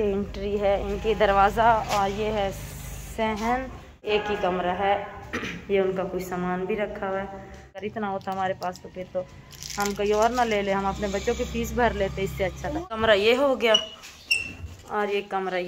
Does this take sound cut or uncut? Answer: cut